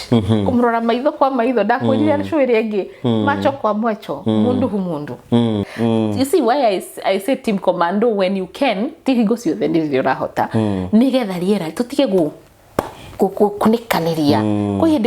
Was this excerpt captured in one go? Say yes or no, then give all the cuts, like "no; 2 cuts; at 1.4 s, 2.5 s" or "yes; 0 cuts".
no; 1 cut; at 5.7 s